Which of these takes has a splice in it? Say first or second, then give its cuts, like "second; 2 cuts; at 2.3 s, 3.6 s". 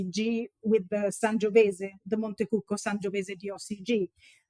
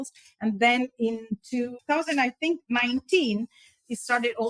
second; 1 cut; at 1.8 s